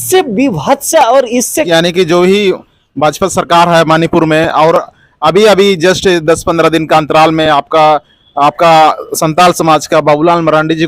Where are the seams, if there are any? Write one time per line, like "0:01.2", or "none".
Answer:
0:01.7